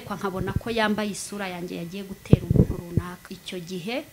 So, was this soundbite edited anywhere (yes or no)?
yes